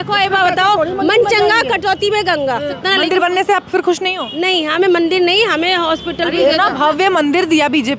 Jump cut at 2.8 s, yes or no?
yes